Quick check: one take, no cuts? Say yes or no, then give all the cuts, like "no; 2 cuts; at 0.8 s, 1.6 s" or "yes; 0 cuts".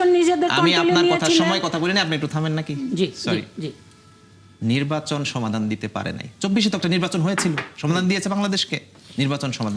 yes; 0 cuts